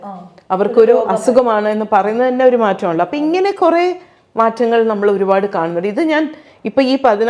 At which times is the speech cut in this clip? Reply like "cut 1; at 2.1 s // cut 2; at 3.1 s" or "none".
none